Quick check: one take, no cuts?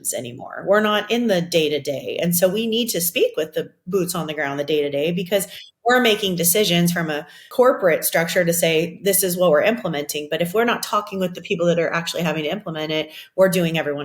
no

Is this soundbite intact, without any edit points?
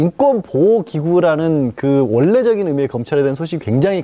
no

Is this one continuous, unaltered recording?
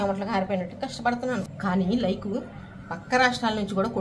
no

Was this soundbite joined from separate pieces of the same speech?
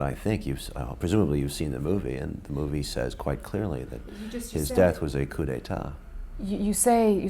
no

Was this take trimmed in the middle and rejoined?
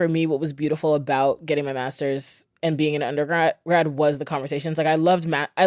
no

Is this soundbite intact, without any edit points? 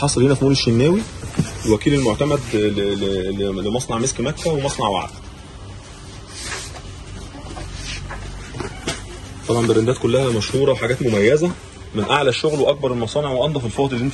yes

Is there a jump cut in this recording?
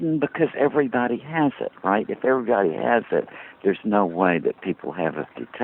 no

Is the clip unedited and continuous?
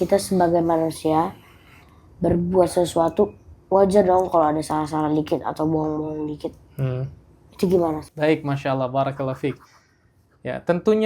yes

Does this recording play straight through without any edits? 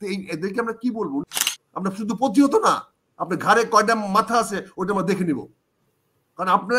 no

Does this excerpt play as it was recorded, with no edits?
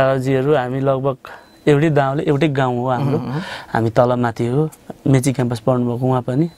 yes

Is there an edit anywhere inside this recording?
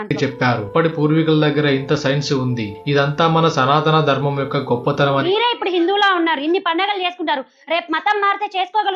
yes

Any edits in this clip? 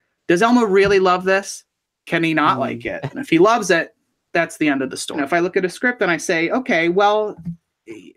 yes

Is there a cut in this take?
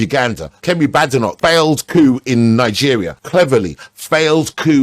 yes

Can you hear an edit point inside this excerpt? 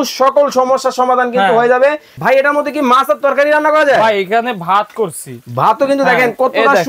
yes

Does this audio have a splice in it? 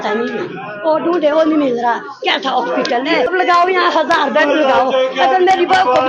yes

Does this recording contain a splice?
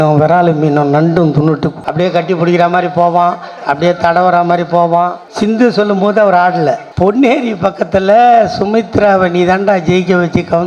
yes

